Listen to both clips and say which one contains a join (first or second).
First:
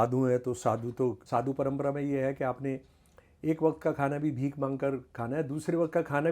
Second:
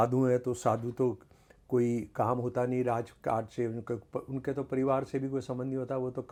first